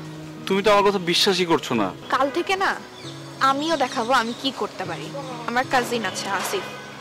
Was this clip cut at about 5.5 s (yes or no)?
yes